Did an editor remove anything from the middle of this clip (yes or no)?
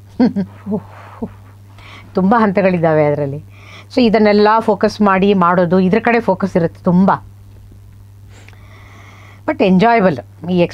no